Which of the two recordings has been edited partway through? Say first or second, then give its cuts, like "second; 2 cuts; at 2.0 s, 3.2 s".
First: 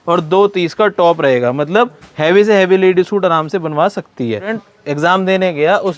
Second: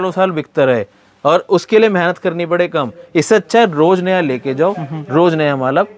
first; 1 cut; at 4.6 s